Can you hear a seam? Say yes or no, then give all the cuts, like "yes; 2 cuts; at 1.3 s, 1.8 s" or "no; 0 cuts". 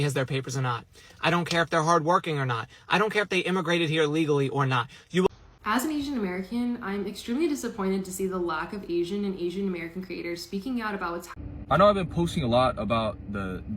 yes; 2 cuts; at 5.3 s, 11.3 s